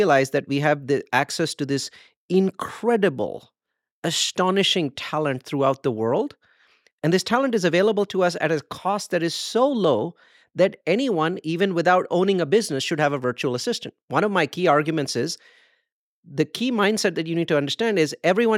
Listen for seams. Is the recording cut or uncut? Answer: uncut